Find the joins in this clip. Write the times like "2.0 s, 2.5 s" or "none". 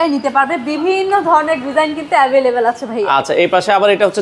none